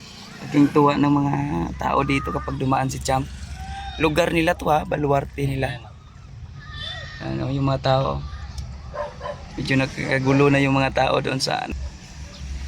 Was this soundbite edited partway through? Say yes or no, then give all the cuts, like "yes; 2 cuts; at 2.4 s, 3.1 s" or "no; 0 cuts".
yes; 1 cut; at 11.7 s